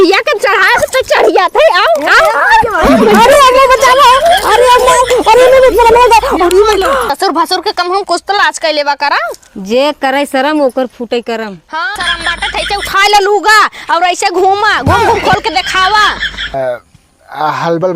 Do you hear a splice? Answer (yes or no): yes